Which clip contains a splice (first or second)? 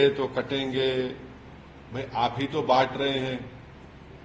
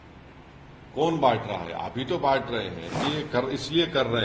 second